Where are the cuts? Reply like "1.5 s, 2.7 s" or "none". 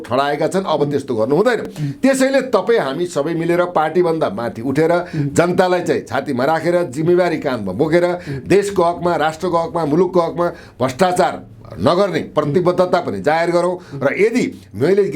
none